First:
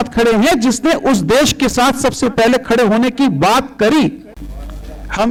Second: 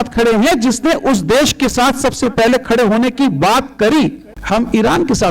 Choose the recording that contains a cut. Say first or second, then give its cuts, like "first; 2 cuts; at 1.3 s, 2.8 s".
second; 1 cut; at 4.3 s